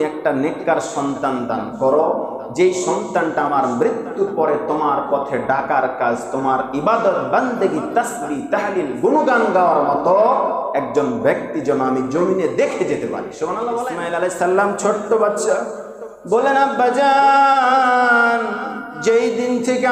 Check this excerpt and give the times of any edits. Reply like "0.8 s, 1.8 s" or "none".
13.8 s